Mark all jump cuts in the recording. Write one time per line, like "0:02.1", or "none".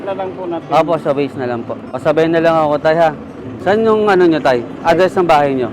none